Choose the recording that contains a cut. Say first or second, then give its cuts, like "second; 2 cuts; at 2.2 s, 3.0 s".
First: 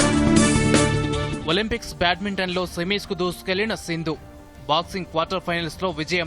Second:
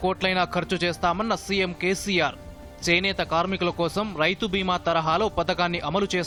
first; 1 cut; at 1.1 s